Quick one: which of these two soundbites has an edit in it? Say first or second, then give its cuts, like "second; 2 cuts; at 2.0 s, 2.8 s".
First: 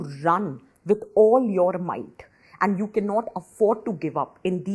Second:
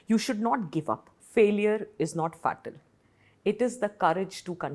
second; 1 cut; at 1.1 s